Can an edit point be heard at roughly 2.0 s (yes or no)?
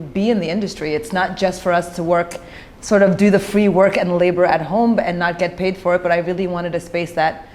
no